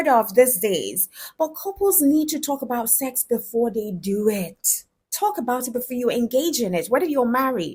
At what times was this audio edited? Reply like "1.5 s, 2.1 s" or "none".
none